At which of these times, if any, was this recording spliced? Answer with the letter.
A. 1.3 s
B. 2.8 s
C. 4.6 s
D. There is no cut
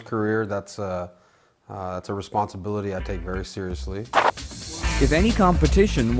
C